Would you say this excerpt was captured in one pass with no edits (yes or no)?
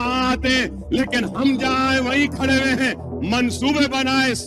yes